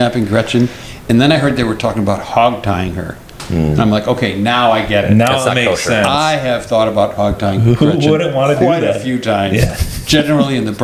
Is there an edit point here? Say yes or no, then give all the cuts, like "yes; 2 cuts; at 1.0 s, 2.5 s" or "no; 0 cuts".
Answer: no; 0 cuts